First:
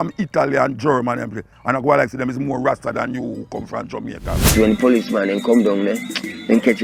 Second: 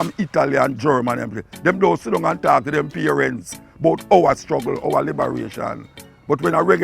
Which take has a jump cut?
first; 2 cuts; at 1.4 s, 4.5 s

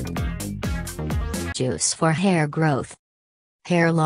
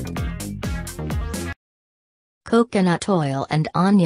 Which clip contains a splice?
second; 1 cut; at 1.8 s

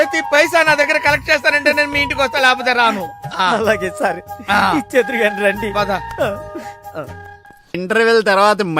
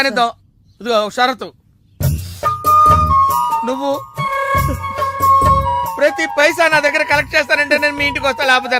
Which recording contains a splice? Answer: first; 1 cut; at 7.7 s

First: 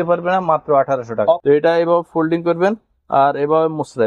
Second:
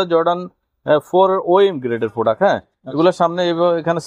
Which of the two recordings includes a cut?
first; 1 cut; at 1.4 s

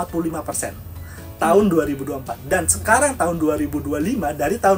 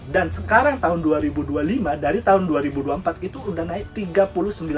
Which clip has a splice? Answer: second; 1 cut; at 3.9 s

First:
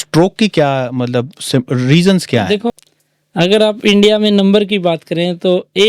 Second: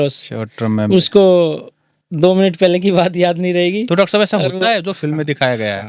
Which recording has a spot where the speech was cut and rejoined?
first; 1 cut; at 2.7 s

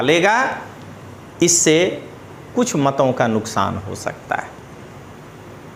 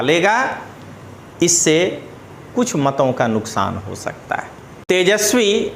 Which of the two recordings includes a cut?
second; 1 cut; at 4.8 s

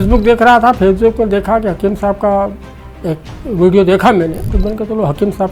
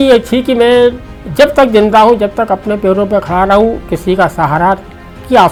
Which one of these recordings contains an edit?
first; 1 cut; at 4.5 s

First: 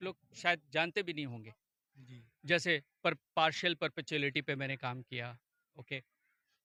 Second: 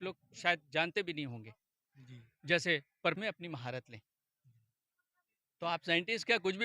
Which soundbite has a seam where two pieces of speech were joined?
second; 1 cut; at 3.2 s

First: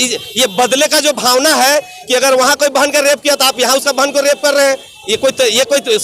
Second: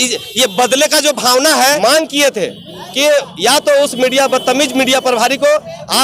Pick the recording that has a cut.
second; 1 cut; at 1.8 s

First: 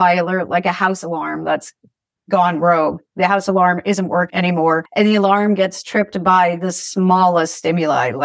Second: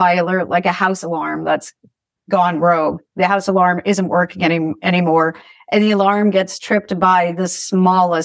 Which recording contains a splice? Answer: first; 1 cut; at 4.5 s

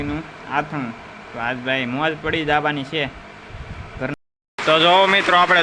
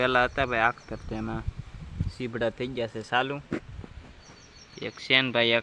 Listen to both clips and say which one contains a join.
first; 1 cut; at 4.1 s

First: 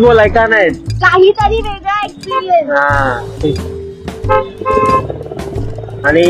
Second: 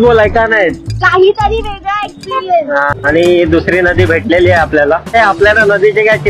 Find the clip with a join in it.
second; 2 cuts; at 2.9 s, 5.1 s

